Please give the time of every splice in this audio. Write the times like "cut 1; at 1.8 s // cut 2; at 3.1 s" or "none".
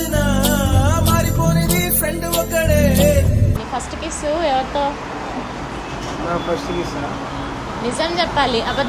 cut 1; at 3.6 s